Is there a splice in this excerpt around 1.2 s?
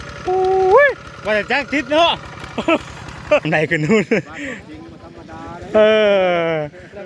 no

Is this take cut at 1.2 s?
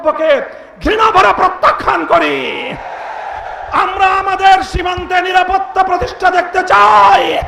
no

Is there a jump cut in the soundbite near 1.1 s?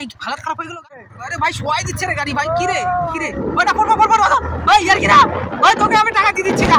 yes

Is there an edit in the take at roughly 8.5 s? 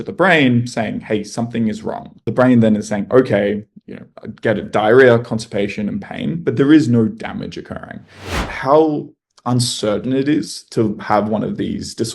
yes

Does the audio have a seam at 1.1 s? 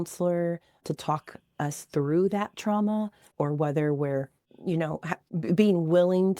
no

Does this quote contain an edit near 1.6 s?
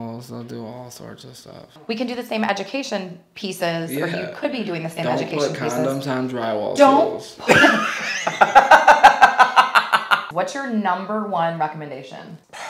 yes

